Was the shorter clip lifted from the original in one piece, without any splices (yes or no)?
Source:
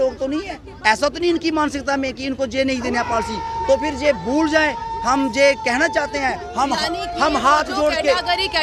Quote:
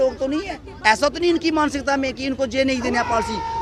yes